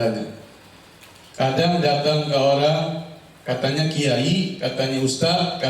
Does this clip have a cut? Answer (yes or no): no